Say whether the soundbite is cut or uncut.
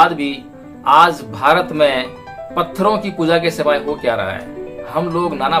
uncut